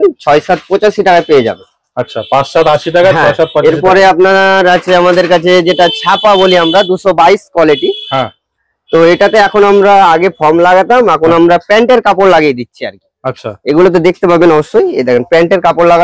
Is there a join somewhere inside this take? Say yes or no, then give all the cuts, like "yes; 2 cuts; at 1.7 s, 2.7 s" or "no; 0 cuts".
no; 0 cuts